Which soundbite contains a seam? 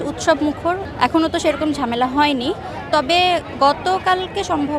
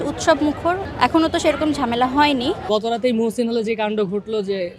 second; 1 cut; at 2.6 s

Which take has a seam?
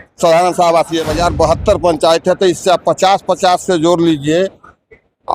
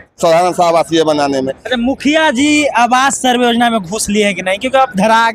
first; 1 cut; at 1.1 s

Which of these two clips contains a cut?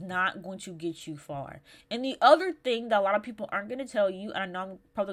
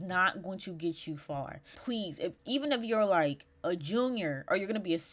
second; 1 cut; at 1.8 s

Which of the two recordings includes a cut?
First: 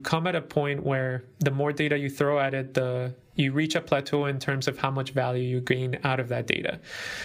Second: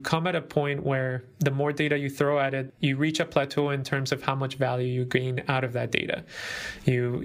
second; 1 cut; at 2.6 s

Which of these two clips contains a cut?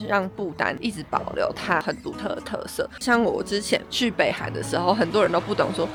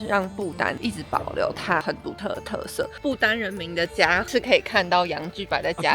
second; 2 cuts; at 2.9 s, 4.3 s

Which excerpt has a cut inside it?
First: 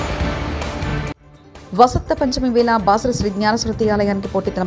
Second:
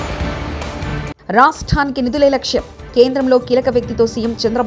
second; 1 cut; at 1.1 s

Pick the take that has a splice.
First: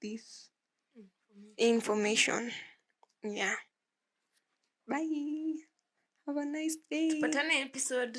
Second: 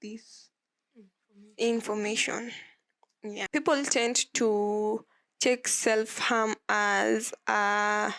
second; 1 cut; at 3.5 s

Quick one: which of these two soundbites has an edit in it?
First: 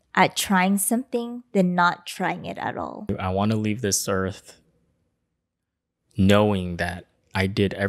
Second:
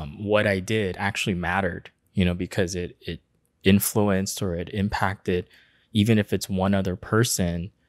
first; 1 cut; at 3.1 s

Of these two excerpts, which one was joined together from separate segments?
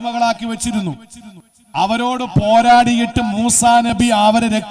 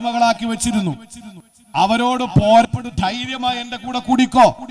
second; 1 cut; at 2.6 s

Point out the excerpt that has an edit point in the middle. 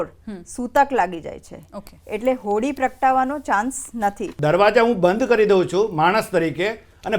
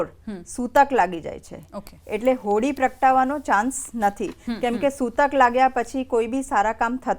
first; 1 cut; at 4.3 s

